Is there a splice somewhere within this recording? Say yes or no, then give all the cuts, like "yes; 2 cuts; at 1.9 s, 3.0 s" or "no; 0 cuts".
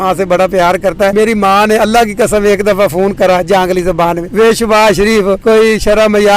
yes; 3 cuts; at 1.1 s, 4.2 s, 5.4 s